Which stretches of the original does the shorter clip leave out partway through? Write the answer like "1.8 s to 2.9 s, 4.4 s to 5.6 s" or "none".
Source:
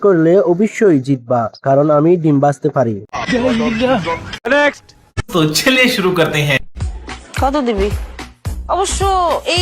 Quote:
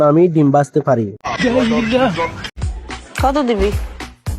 4.4 s to 6.7 s

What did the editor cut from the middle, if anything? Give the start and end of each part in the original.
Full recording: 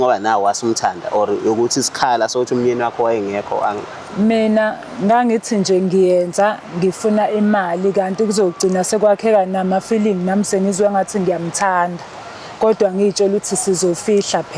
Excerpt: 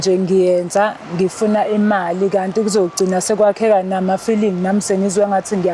none

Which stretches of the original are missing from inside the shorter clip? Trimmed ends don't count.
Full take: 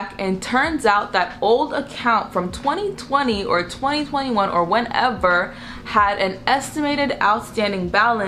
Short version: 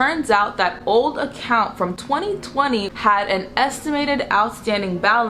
3.4 s to 5.8 s

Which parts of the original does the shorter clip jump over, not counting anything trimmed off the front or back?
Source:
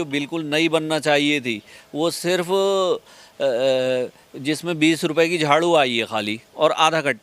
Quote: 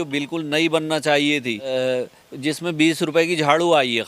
1.7 s to 3.7 s

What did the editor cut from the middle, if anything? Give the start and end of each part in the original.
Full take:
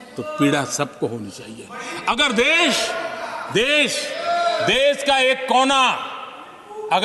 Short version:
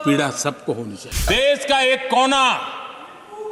1.6 s to 4.6 s

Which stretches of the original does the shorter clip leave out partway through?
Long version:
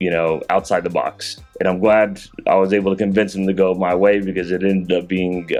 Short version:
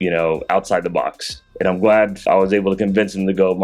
2.2 s to 2.4 s

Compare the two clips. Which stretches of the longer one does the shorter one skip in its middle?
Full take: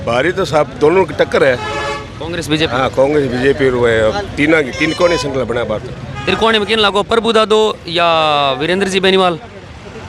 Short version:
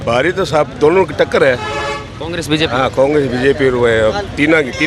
none

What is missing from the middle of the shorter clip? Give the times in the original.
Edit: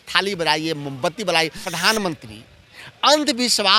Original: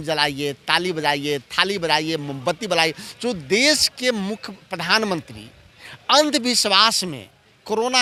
3.1 s to 4.7 s

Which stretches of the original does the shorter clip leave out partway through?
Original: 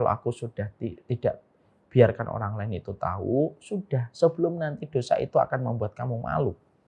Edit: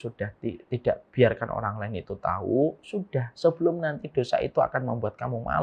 1.4 s to 1.8 s

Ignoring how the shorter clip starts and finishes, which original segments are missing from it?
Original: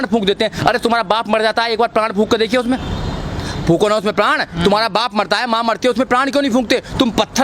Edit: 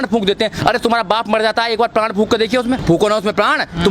2.8 s to 3.6 s

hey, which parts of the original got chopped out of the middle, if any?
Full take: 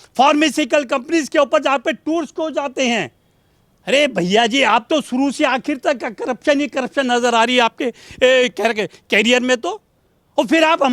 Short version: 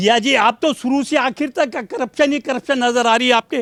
none

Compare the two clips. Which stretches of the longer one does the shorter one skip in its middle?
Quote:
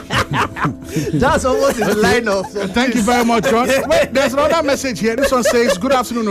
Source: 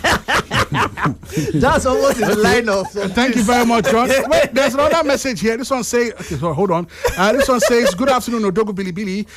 5.6 s to 7.4 s

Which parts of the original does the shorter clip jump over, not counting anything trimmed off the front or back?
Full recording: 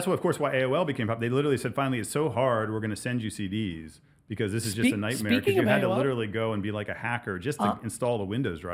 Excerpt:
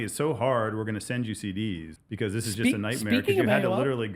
3.9 s to 4.2 s

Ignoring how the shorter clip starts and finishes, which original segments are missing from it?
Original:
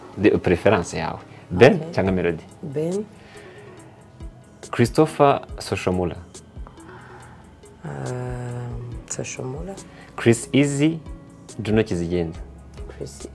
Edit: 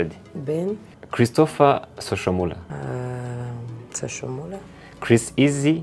3.2 s to 4.5 s, 6.2 s to 7.8 s

